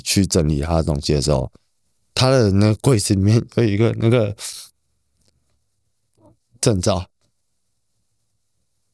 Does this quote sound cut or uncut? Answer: uncut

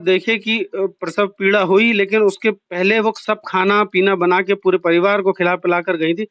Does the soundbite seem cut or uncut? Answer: uncut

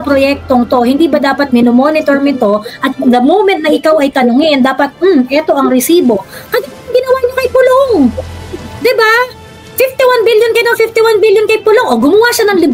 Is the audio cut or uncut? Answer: uncut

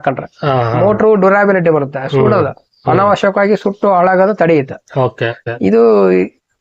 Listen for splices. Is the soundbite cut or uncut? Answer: cut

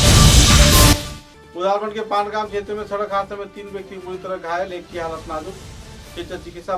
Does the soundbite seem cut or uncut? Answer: uncut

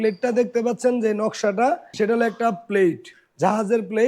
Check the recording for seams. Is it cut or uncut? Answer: cut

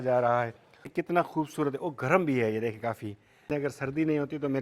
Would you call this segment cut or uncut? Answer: cut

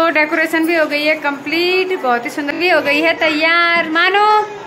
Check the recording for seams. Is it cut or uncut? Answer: cut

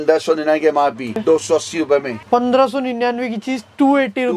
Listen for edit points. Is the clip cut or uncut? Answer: cut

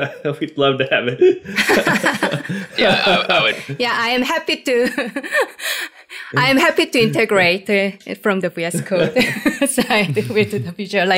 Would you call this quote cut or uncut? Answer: uncut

